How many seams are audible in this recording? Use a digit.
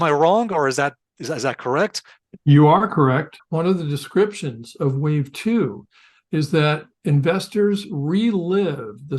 1